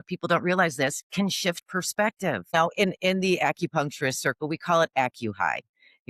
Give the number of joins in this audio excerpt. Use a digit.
1